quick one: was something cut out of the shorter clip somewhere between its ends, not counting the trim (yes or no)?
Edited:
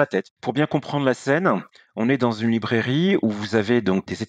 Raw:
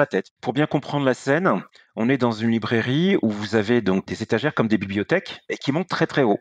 no